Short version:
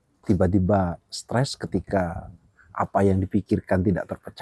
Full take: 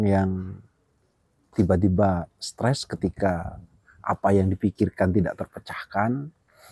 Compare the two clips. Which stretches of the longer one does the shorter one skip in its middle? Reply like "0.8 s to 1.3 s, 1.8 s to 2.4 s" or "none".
none